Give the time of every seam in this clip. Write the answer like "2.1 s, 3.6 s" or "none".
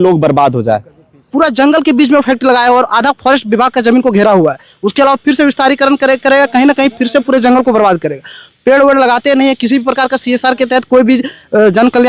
1.3 s